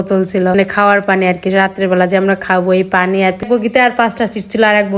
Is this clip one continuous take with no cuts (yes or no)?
no